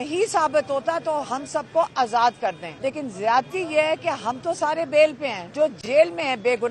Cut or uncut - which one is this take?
cut